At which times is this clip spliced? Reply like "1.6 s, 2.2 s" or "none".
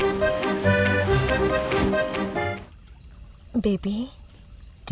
2.5 s